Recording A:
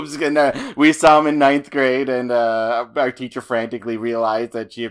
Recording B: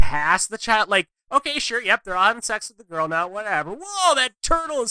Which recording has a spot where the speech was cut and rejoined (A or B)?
B